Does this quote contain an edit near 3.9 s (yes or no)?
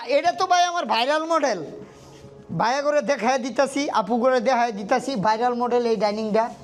no